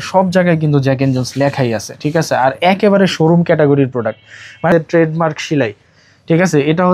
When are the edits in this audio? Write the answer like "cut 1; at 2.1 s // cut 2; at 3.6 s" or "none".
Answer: cut 1; at 4.7 s

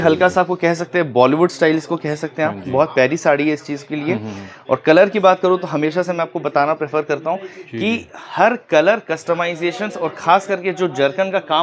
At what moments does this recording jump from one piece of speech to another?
none

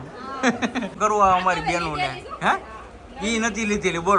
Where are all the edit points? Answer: cut 1; at 1.0 s

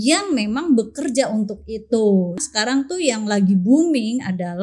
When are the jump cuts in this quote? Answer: cut 1; at 2.5 s

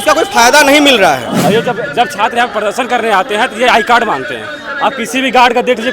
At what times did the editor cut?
cut 1; at 1.3 s

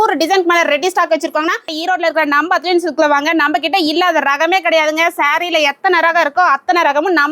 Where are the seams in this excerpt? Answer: cut 1; at 1.7 s

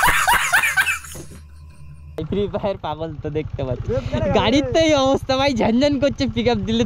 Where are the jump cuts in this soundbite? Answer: cut 1; at 2.3 s

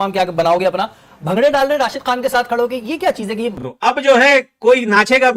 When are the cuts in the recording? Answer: cut 1; at 3.6 s

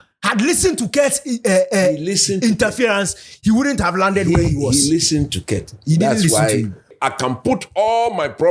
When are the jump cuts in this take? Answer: cut 1; at 6.9 s

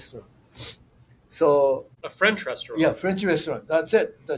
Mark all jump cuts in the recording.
cut 1; at 2.0 s

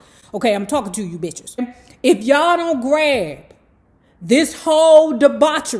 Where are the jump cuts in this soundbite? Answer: cut 1; at 1.6 s

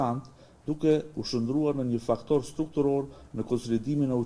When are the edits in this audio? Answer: none

